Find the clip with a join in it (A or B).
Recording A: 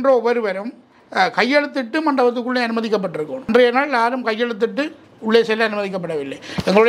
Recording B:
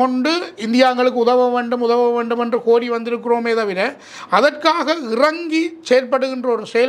A